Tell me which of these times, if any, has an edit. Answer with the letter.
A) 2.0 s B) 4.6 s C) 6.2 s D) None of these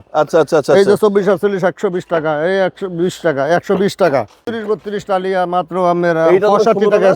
B